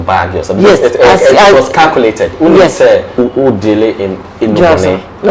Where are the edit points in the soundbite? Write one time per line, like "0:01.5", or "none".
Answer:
0:03.2

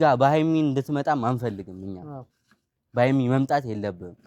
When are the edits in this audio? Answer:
none

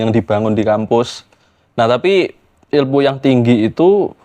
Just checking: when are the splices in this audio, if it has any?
none

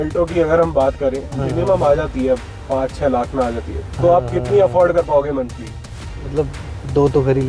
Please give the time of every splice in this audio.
none

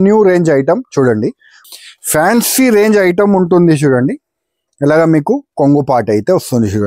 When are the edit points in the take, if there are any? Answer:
0:01.6

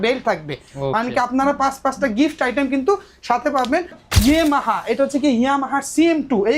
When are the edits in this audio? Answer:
0:04.0

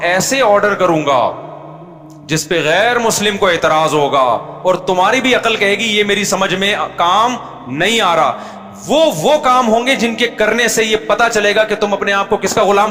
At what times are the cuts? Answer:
none

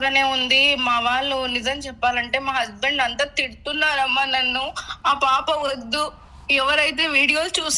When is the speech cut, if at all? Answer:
none

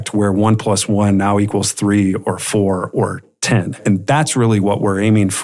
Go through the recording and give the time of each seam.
0:03.8

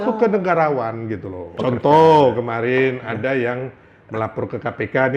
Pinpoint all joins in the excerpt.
0:01.5

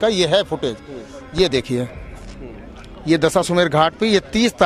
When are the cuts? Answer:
none

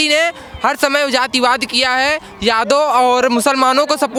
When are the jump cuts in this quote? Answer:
none

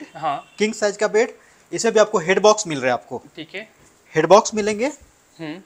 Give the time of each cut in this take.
none

